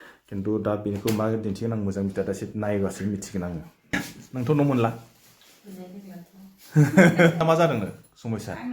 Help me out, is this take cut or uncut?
cut